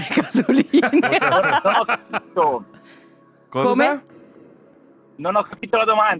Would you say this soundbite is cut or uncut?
uncut